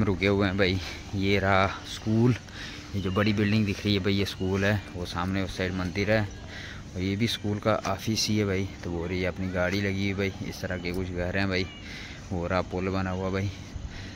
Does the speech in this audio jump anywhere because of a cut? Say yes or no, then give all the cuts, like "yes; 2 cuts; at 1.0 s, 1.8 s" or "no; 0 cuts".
no; 0 cuts